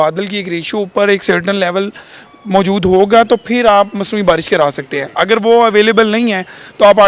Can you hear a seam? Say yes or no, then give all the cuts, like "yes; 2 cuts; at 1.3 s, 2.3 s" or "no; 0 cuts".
no; 0 cuts